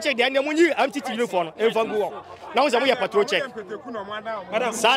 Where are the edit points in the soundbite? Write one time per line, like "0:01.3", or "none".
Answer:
none